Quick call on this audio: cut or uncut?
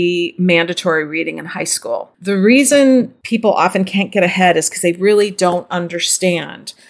cut